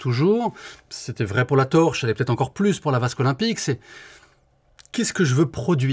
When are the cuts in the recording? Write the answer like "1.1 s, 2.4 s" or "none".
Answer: none